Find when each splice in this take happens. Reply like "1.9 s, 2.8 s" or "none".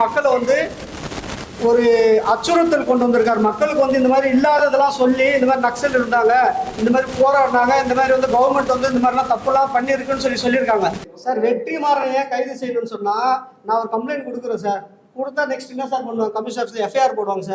11.1 s